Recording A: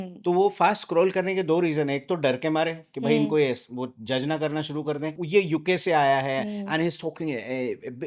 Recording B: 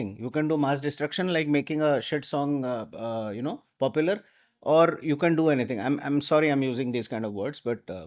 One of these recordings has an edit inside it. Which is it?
A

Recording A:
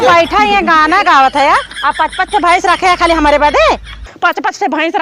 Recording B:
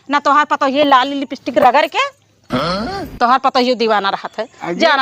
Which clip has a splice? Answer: A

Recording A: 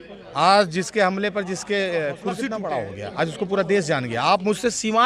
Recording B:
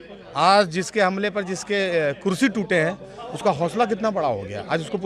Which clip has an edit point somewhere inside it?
A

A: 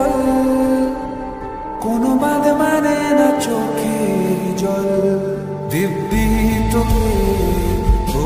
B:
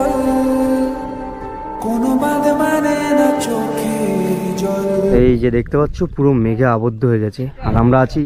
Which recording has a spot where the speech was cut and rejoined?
B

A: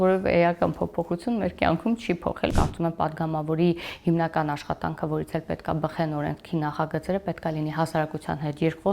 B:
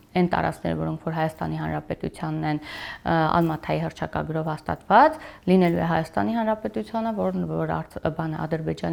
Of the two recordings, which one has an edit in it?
A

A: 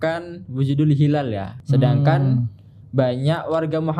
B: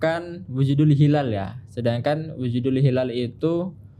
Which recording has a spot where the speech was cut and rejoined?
A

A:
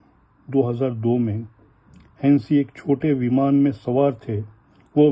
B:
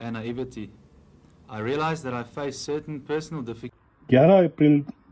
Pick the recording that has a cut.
B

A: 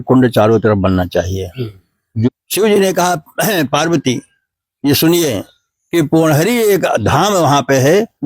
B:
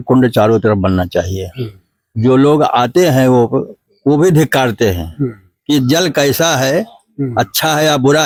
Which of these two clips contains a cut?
A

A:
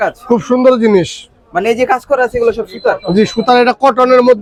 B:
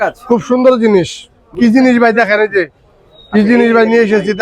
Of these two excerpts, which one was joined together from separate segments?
B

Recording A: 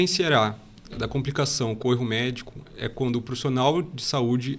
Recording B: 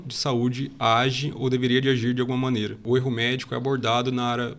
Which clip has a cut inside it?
B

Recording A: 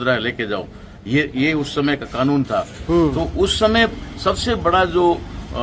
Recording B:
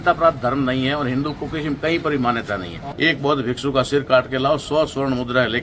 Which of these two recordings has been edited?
B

